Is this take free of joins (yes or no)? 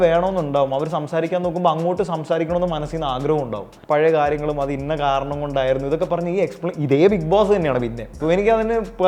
no